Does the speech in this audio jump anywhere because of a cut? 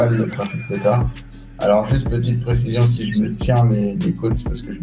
no; 0 cuts

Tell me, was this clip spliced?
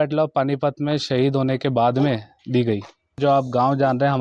yes; 1 cut; at 3.2 s

